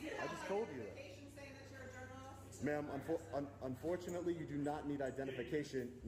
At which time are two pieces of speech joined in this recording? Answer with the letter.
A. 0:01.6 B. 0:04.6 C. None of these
B